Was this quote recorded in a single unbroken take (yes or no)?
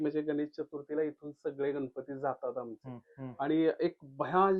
yes